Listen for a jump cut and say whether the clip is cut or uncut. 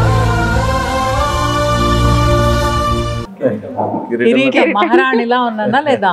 uncut